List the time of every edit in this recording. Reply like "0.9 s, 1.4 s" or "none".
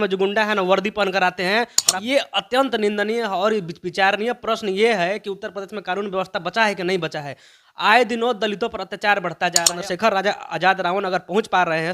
1.8 s, 9.7 s